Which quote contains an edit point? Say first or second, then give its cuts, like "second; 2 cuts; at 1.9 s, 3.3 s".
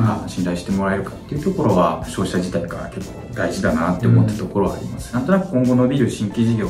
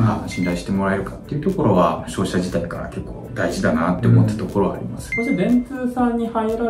first; 1 cut; at 5.0 s